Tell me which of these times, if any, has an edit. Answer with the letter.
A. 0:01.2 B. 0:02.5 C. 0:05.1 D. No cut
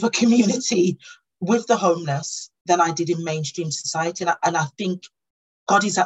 C